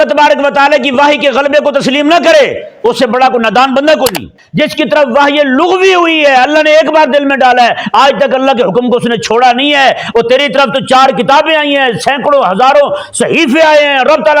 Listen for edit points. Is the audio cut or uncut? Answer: cut